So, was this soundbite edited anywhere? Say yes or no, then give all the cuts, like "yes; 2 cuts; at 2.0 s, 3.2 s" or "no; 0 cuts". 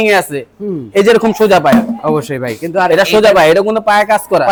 no; 0 cuts